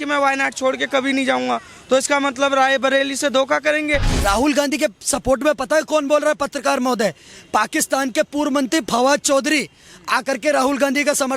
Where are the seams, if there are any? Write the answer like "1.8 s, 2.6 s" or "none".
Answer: 4.1 s